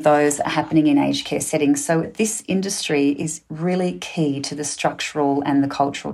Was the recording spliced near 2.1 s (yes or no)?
yes